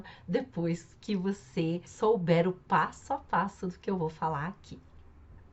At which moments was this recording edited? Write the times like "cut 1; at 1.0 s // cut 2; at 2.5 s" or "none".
cut 1; at 1.9 s